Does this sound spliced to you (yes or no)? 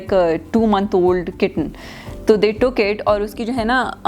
no